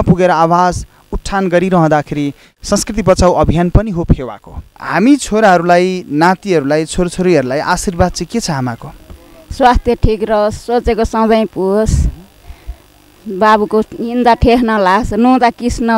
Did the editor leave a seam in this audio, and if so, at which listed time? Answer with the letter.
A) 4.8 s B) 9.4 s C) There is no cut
A